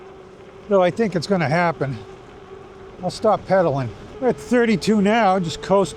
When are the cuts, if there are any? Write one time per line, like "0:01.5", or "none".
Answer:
0:04.0